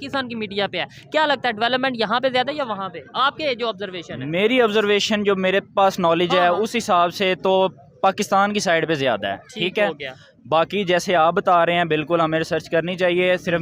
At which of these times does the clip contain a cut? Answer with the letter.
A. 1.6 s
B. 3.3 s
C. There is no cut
C